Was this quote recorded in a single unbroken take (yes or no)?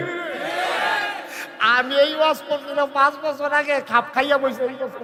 yes